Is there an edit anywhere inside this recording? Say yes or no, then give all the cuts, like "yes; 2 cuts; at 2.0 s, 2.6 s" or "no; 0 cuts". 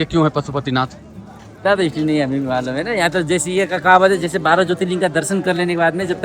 no; 0 cuts